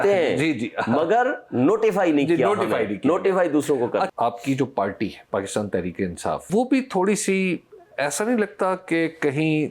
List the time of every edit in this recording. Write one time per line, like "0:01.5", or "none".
0:04.1
0:05.2
0:06.4